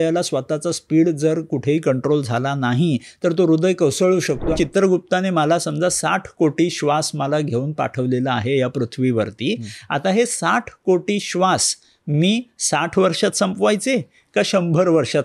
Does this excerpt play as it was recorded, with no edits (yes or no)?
no